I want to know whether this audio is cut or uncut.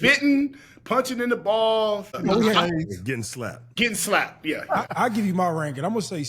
cut